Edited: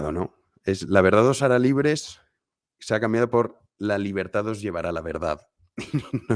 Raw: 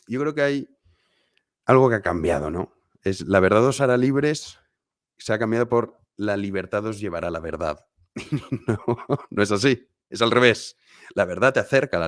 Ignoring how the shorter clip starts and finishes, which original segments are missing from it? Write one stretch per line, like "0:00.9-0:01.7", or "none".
none